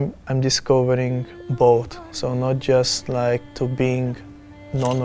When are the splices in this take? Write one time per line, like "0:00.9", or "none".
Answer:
0:03.5